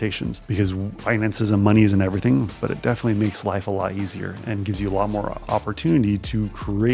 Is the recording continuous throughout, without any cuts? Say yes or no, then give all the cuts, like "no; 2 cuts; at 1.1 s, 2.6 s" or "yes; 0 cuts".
yes; 0 cuts